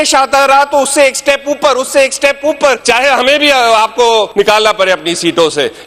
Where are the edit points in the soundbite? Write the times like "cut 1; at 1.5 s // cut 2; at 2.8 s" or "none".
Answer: cut 1; at 2.8 s // cut 2; at 4.3 s